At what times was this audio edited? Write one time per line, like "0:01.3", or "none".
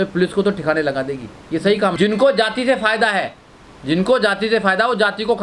0:01.9